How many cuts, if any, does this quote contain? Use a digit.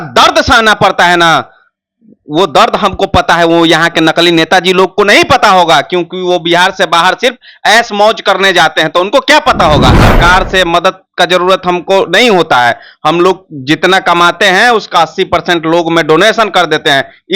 1